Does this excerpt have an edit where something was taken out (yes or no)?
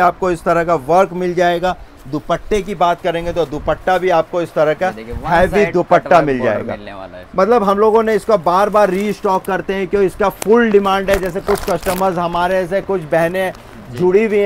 no